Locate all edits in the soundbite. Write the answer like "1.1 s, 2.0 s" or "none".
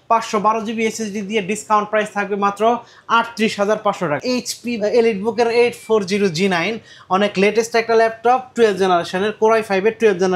4.2 s